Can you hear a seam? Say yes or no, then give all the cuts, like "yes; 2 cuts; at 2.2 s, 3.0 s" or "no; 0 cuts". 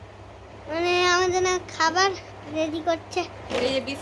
no; 0 cuts